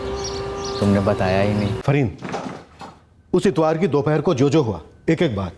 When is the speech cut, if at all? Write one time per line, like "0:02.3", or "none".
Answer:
0:01.8

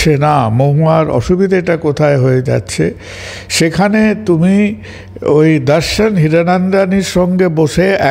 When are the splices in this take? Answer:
none

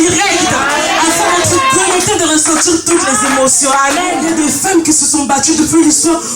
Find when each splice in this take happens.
0:04.2

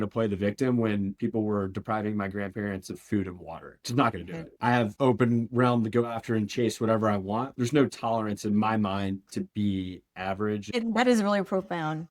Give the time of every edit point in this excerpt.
0:04.6
0:10.7

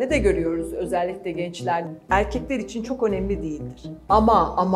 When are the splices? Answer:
0:01.9

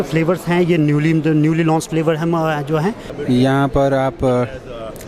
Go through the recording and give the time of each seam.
0:03.1

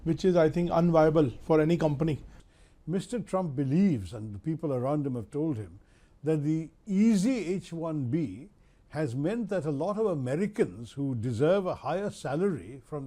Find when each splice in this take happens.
0:02.3

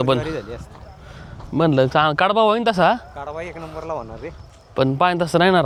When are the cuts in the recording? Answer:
none

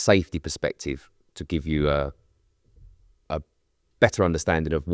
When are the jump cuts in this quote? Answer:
none

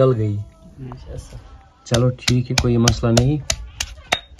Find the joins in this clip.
none

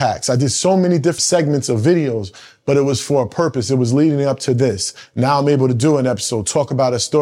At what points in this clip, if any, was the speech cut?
0:01.2

